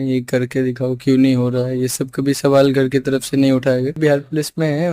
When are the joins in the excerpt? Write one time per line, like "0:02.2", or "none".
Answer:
0:04.0